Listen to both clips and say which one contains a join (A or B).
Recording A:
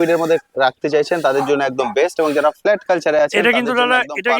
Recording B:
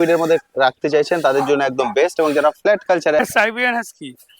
B